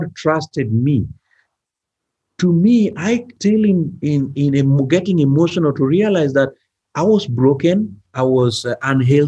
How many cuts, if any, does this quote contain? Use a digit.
2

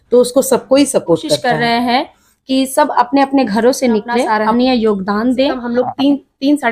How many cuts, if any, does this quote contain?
3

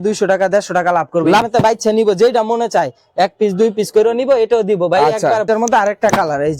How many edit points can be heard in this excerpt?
2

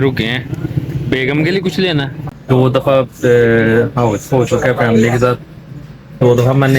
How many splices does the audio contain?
1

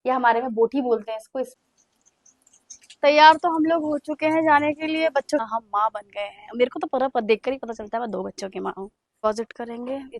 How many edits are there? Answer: 3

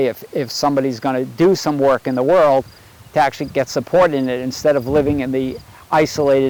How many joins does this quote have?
0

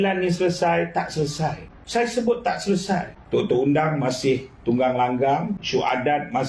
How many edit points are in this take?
3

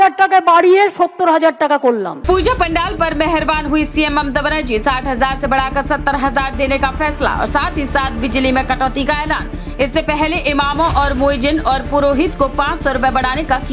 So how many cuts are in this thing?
1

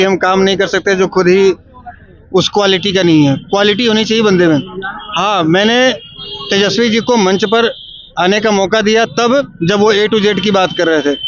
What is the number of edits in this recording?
0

